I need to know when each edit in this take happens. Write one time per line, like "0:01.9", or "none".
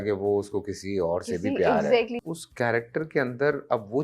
0:02.2